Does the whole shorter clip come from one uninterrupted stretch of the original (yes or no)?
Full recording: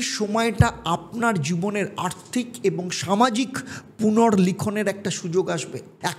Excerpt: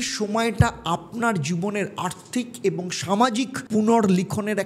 no